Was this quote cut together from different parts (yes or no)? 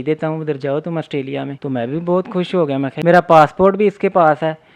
yes